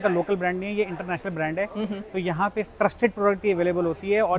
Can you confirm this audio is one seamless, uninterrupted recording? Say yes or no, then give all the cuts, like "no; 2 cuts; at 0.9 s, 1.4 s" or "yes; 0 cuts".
yes; 0 cuts